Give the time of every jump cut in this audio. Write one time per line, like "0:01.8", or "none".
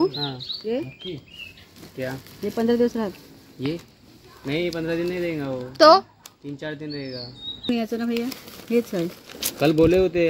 0:07.7